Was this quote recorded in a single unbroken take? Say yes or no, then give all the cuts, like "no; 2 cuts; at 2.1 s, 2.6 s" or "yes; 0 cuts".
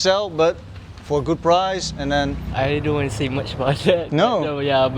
no; 1 cut; at 2.5 s